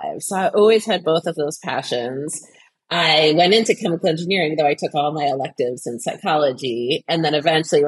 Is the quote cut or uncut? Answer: uncut